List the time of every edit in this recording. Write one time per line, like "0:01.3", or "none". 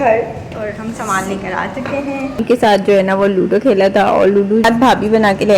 0:02.7
0:04.6